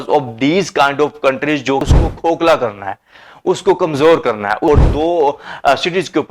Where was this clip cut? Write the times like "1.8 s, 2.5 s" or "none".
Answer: 1.8 s, 4.7 s